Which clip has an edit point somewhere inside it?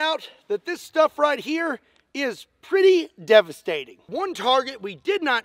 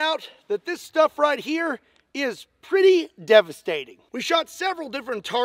first; 1 cut; at 4.1 s

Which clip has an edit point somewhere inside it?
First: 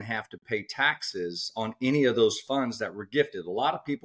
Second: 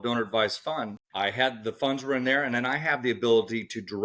second; 1 cut; at 1.0 s

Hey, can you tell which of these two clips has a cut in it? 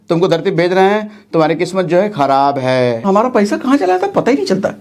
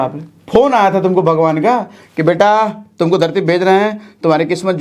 first; 1 cut; at 3.0 s

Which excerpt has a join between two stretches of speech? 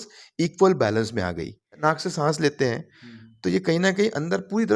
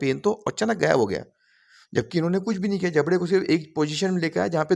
first; 1 cut; at 1.8 s

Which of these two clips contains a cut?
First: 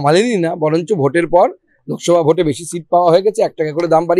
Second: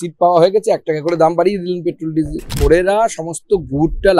second; 1 cut; at 2.5 s

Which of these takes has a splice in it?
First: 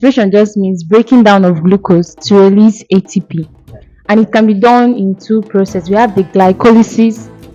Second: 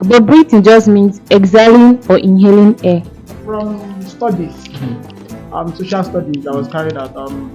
second; 1 cut; at 3.3 s

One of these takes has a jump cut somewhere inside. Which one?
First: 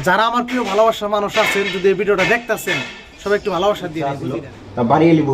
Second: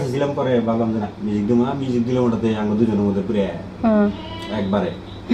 first; 1 cut; at 4.2 s

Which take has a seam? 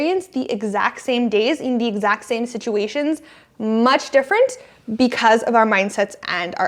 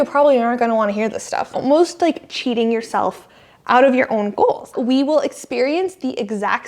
second; 2 cuts; at 1.6 s, 4.7 s

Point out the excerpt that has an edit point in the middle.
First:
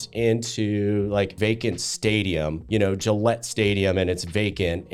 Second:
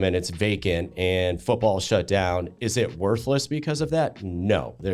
first; 2 cuts; at 1.3 s, 2.6 s

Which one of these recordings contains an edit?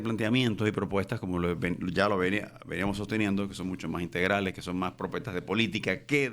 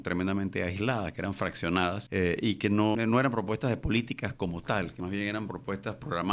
second; 3 cuts; at 2.0 s, 3.0 s, 5.3 s

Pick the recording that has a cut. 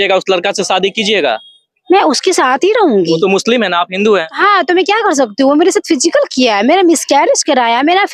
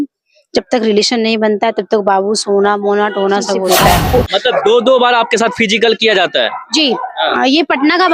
second; 1 cut; at 3.6 s

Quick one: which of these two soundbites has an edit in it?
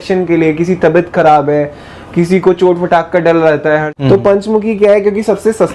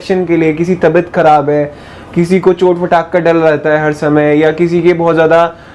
first; 1 cut; at 3.9 s

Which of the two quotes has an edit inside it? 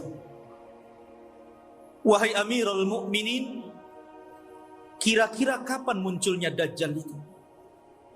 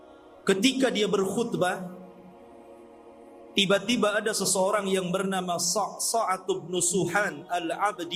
first; 1 cut; at 7.2 s

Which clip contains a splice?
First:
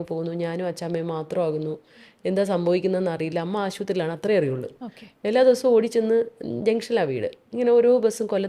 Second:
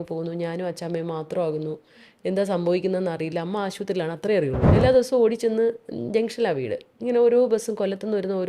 second; 1 cut; at 4.6 s

